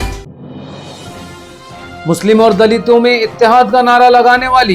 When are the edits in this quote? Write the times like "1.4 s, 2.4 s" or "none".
0.9 s